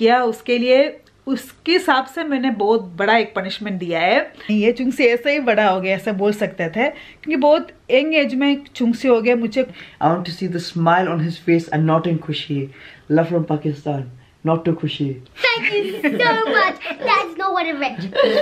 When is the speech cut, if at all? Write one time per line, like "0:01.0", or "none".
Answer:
0:04.5
0:09.7
0:12.9
0:15.2